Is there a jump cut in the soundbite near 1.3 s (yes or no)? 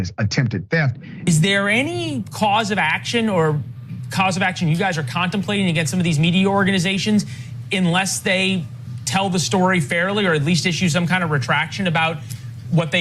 yes